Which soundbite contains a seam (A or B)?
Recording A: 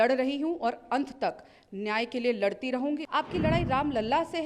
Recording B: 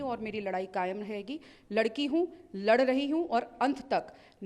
A